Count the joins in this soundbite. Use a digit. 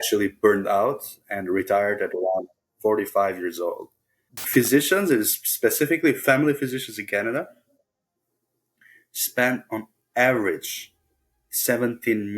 1